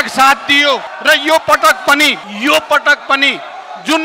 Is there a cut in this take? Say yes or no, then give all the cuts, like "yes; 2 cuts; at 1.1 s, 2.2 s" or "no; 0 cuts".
yes; 2 cuts; at 0.9 s, 2.3 s